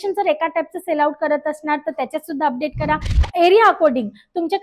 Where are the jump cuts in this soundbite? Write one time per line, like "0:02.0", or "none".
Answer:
0:03.1